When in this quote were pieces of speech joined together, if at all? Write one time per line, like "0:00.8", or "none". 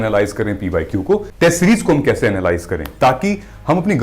0:01.3